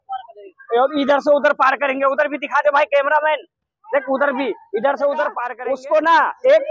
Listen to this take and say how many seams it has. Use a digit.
1